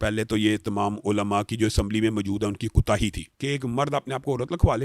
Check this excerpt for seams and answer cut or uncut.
cut